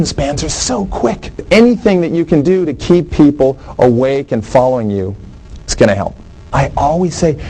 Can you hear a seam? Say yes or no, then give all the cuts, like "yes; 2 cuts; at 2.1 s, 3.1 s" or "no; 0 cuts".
yes; 2 cuts; at 1.4 s, 6.4 s